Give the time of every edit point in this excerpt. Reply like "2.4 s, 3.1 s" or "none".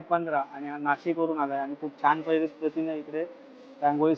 none